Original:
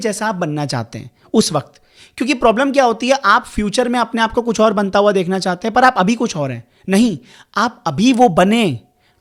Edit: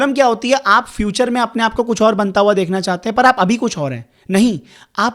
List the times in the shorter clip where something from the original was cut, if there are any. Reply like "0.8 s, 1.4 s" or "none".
none